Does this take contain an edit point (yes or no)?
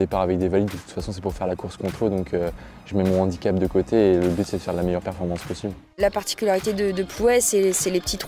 yes